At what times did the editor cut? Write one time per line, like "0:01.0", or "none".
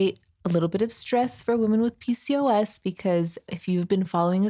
0:03.5